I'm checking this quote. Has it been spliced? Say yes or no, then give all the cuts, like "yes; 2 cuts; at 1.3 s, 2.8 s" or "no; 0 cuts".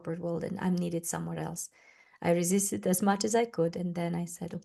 no; 0 cuts